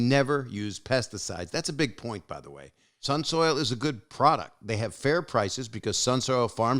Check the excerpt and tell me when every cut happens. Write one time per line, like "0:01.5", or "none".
0:02.9